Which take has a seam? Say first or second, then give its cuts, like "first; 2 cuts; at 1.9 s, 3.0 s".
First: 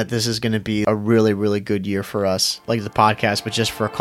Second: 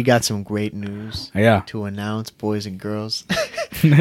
first; 2 cuts; at 0.8 s, 2.6 s